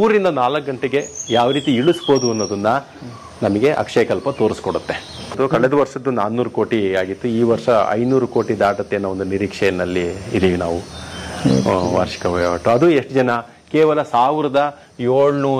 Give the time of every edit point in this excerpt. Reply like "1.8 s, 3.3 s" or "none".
5.4 s